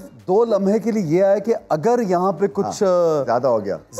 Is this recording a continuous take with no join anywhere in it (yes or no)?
yes